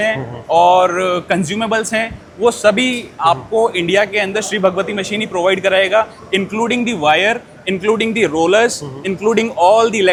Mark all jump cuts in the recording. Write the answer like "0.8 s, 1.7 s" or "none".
none